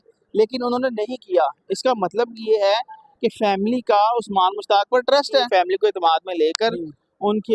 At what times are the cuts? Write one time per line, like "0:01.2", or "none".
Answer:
0:05.5